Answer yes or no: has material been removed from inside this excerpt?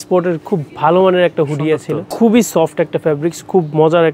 yes